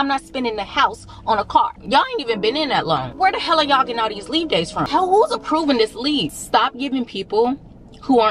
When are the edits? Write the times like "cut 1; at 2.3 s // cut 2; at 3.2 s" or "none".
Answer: cut 1; at 1.8 s // cut 2; at 3.1 s // cut 3; at 4.9 s // cut 4; at 6.4 s